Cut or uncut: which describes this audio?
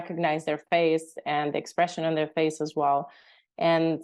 uncut